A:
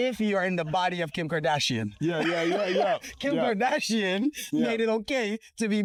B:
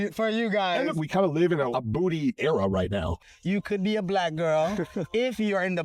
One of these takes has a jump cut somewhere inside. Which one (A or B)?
B